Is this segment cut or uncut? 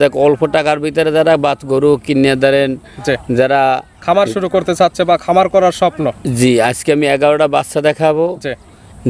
uncut